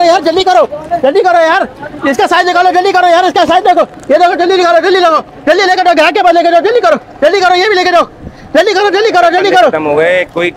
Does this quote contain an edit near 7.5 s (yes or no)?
no